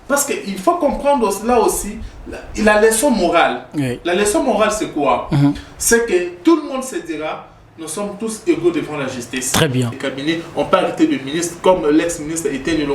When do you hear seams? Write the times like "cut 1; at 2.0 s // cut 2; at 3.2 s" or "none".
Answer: cut 1; at 9.9 s